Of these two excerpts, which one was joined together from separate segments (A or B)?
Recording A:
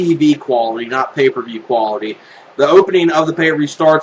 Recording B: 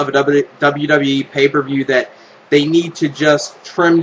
A